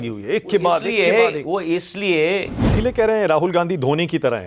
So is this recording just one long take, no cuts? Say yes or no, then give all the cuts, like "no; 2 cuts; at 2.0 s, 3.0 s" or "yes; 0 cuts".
no; 1 cut; at 2.7 s